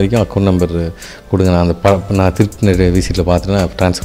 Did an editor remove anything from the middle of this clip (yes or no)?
no